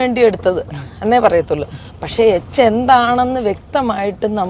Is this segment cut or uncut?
uncut